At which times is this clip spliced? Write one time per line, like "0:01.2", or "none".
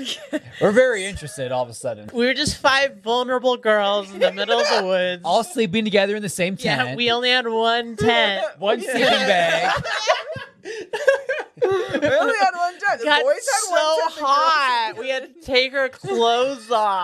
0:02.0